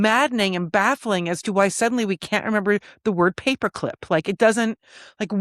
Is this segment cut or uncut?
uncut